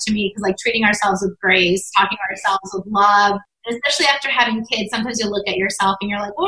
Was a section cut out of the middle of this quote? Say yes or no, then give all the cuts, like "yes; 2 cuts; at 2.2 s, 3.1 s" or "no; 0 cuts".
yes; 1 cut; at 3.7 s